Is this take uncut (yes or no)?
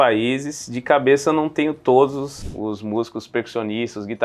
no